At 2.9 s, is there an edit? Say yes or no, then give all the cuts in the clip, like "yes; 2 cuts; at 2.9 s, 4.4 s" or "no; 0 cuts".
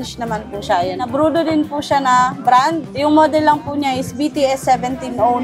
yes; 2 cuts; at 1.1 s, 2.9 s